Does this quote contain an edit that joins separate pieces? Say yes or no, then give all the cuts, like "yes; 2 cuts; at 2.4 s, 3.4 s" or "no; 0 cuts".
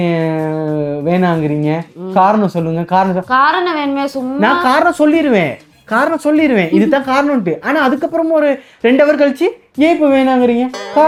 no; 0 cuts